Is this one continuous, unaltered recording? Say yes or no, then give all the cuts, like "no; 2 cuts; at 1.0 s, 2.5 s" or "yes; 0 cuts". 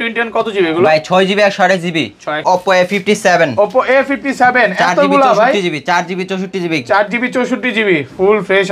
no; 1 cut; at 2.4 s